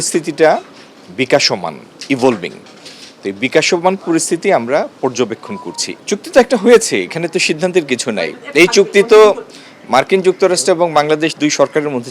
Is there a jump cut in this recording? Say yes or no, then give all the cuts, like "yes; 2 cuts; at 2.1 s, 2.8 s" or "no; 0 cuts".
yes; 1 cut; at 5.9 s